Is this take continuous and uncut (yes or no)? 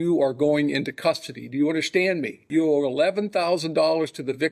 no